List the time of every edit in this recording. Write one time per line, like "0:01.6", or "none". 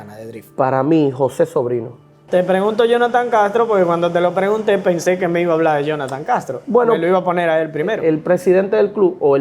0:02.2
0:08.0